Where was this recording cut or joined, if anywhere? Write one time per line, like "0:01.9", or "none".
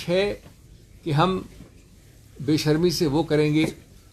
none